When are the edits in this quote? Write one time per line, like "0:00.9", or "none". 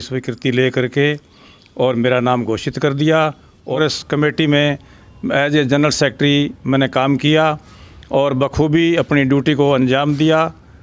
0:03.8